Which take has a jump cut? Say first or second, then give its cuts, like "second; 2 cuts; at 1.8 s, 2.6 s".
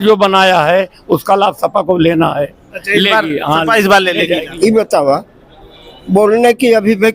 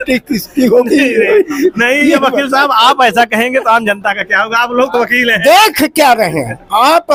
first; 1 cut; at 4.5 s